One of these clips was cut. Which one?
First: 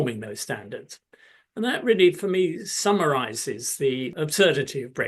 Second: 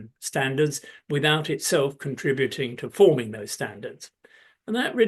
first; 1 cut; at 4.1 s

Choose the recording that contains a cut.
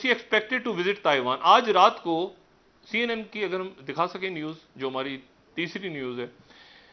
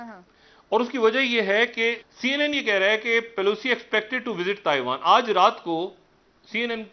second; 1 cut; at 2.1 s

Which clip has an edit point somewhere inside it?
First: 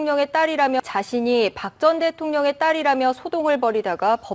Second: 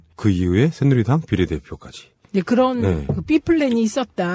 first; 2 cuts; at 0.8 s, 3.0 s

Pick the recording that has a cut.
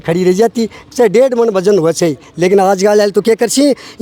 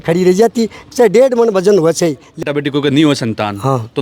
second; 1 cut; at 2.3 s

